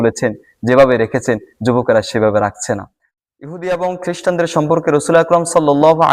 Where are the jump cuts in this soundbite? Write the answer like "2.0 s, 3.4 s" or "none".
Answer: 3.0 s